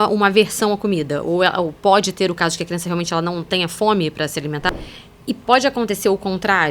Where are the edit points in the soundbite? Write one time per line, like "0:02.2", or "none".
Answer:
0:04.6